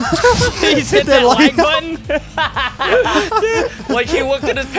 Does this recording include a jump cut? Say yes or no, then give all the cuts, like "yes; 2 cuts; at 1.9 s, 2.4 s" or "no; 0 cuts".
no; 0 cuts